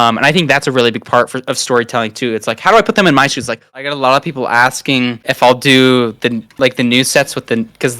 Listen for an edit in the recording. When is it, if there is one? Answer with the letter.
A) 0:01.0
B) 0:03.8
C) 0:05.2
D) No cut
B